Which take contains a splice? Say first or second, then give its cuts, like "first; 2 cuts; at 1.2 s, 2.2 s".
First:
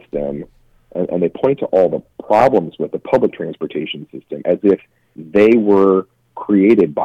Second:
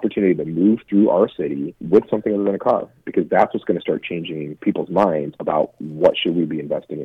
second; 3 cuts; at 1.7 s, 4.5 s, 5.3 s